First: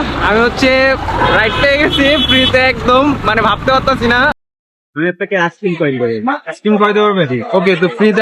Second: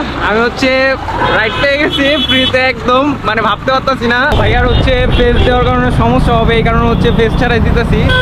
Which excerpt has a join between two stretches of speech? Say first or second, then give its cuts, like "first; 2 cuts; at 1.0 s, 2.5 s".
first; 1 cut; at 4.3 s